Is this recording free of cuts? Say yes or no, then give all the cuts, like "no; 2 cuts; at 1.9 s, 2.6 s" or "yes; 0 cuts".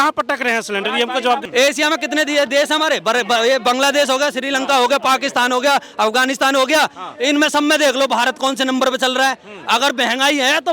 no; 1 cut; at 1.5 s